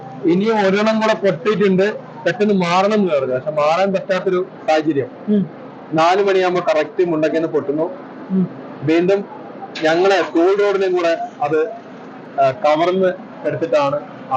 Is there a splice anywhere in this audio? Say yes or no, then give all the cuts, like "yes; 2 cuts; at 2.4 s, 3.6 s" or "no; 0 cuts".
no; 0 cuts